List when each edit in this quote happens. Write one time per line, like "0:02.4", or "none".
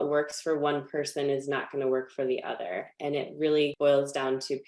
0:03.7

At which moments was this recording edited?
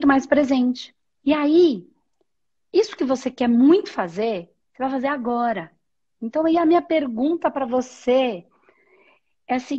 none

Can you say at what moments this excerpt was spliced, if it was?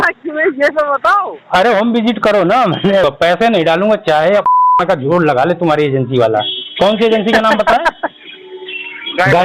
0:03.0

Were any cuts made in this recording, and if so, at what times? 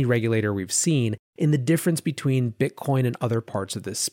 none

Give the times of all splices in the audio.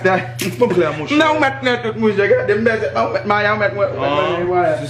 none

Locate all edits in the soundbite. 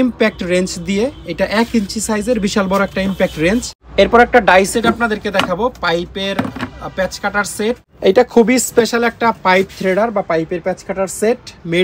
0:03.8
0:07.9

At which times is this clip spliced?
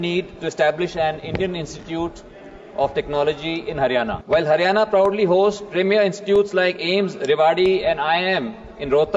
0:04.2

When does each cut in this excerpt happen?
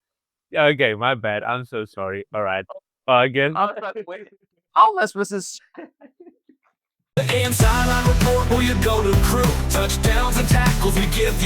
0:06.9

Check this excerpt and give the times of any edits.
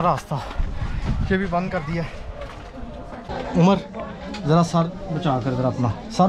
0:03.3

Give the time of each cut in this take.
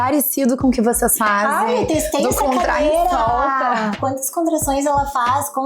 0:04.0

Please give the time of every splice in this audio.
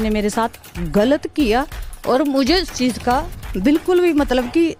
none

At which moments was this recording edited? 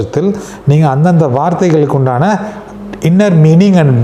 none

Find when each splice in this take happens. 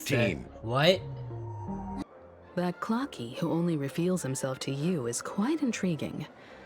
0:02.0

